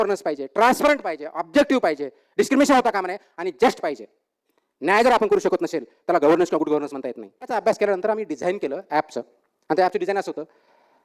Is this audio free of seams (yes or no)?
no